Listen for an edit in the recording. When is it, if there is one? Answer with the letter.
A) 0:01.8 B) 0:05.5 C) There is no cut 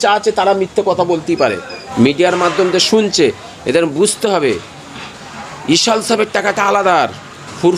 A